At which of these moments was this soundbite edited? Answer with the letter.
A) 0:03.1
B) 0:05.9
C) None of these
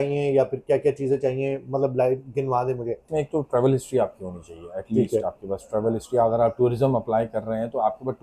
A